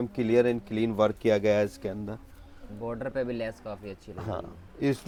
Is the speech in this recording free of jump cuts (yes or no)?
yes